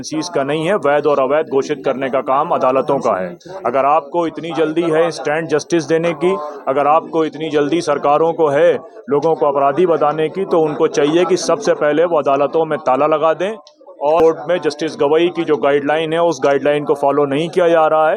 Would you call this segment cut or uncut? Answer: cut